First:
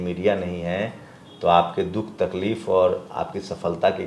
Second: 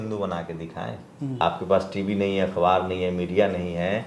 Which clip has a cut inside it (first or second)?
second